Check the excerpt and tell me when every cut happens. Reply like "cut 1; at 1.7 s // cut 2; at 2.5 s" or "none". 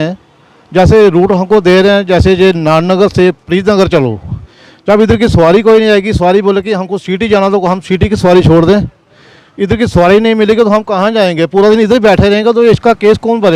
none